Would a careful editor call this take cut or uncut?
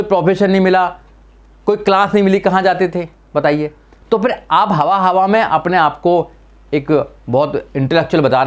uncut